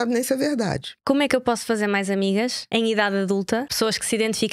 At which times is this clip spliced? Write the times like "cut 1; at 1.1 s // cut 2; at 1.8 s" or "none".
cut 1; at 0.9 s // cut 2; at 2.6 s // cut 3; at 3.7 s